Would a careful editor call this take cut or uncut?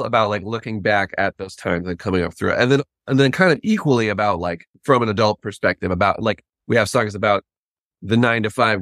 cut